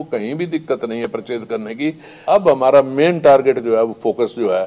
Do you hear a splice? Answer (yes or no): yes